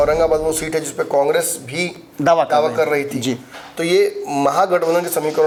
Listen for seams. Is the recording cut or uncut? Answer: uncut